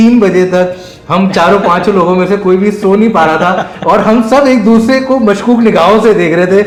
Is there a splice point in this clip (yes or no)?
no